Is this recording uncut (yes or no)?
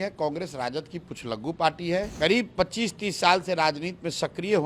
no